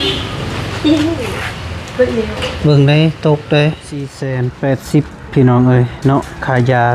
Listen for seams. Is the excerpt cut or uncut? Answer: cut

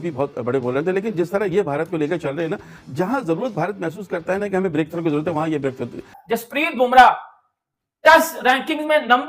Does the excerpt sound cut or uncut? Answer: cut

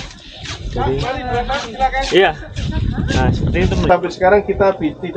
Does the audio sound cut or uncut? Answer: cut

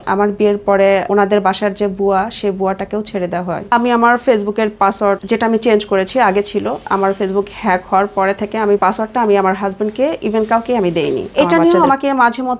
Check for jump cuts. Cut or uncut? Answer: cut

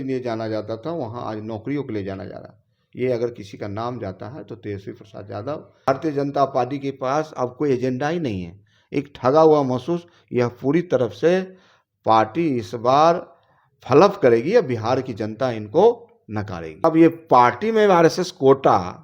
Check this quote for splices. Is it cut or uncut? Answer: cut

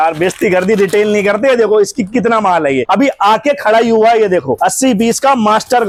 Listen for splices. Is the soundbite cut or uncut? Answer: uncut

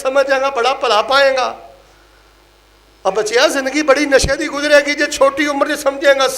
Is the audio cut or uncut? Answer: uncut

